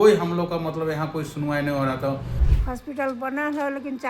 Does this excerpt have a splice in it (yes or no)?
yes